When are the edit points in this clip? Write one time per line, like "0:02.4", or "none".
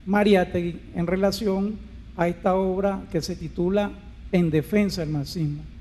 0:04.6